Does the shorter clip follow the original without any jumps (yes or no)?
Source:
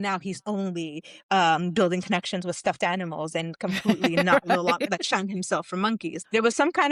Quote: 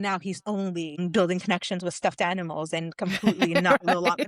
no